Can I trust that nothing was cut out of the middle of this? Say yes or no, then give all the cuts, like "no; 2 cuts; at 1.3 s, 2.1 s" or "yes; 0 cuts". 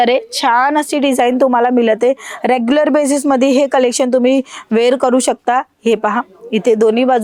yes; 0 cuts